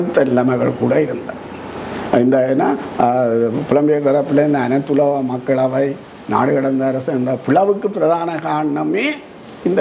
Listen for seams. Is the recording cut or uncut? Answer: uncut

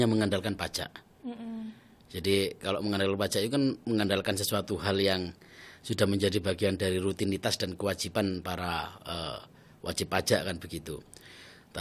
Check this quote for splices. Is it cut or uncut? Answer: uncut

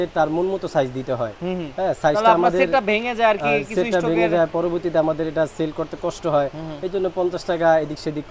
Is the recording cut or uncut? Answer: uncut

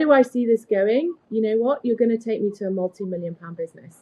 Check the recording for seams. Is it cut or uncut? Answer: uncut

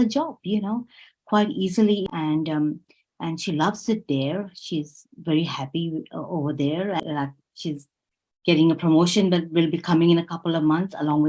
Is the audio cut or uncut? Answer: cut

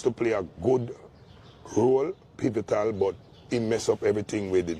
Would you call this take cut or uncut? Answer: uncut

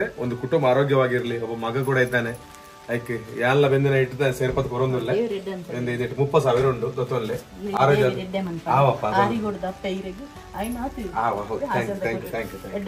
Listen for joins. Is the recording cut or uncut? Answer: uncut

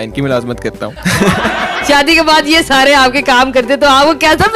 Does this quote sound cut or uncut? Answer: cut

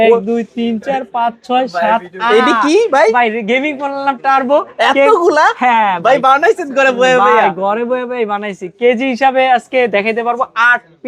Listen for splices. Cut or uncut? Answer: uncut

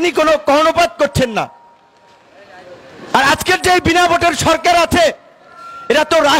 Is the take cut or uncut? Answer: uncut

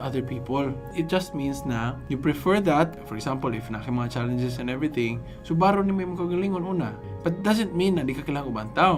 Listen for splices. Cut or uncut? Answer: uncut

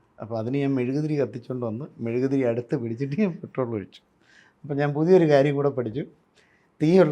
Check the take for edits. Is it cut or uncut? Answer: uncut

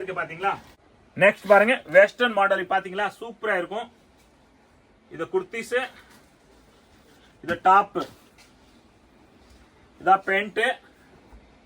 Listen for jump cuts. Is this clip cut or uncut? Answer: cut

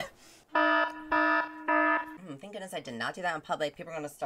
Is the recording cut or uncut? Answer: cut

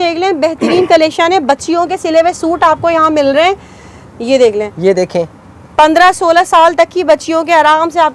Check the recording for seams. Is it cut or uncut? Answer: uncut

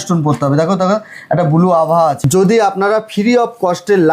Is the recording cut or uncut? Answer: cut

